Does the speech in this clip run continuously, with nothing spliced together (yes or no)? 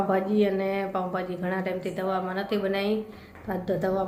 yes